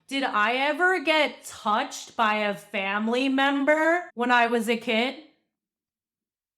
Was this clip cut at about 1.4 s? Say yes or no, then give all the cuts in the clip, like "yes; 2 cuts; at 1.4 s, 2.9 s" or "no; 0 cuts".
no; 1 cut; at 4.1 s